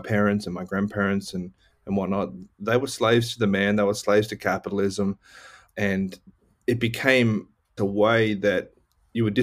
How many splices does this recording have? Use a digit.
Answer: 0